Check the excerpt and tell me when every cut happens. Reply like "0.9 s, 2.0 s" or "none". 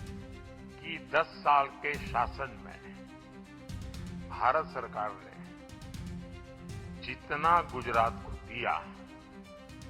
1.1 s, 5.2 s, 6.7 s